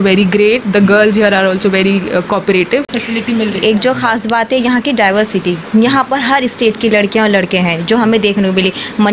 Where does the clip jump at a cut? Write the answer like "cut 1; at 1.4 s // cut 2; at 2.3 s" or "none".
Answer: cut 1; at 2.9 s